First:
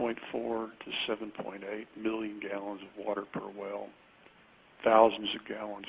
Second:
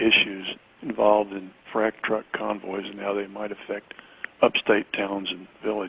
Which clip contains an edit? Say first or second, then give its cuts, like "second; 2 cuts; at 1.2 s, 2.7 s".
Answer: first; 1 cut; at 1.9 s